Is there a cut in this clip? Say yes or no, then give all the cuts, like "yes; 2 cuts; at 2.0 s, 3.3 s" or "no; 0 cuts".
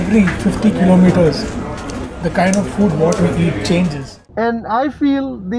yes; 1 cut; at 4.3 s